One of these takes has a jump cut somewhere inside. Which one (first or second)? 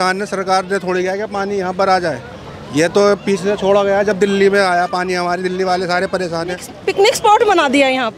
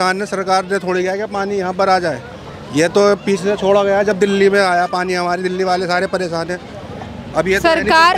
first